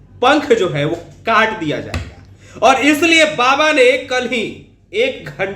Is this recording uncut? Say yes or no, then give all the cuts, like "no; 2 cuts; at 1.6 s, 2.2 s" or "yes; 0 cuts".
yes; 0 cuts